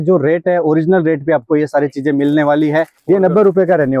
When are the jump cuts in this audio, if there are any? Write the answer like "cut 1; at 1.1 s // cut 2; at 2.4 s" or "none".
cut 1; at 2.9 s